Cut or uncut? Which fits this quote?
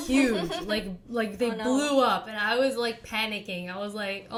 uncut